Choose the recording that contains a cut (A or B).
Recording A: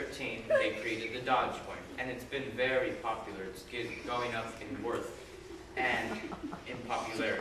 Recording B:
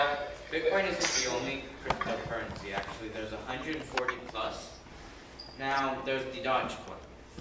A